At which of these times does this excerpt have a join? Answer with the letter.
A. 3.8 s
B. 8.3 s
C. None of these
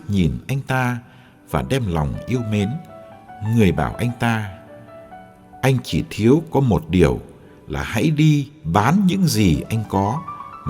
B